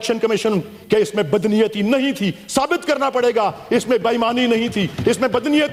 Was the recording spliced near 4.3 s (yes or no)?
no